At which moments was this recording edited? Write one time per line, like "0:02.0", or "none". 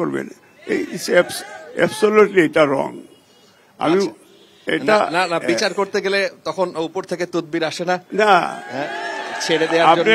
none